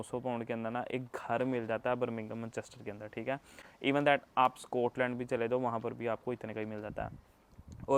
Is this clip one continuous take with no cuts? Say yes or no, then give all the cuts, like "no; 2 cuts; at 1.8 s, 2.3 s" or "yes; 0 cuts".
yes; 0 cuts